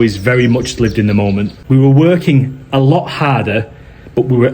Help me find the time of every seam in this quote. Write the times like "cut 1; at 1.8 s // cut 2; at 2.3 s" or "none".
cut 1; at 1.6 s